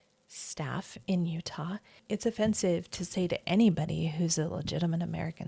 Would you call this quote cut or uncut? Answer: cut